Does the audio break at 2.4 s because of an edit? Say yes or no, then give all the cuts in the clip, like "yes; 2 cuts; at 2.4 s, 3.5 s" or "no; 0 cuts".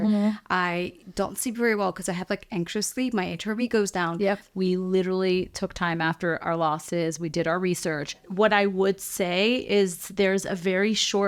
no; 2 cuts; at 4.5 s, 8.2 s